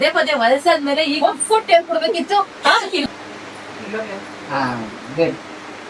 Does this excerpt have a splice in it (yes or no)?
yes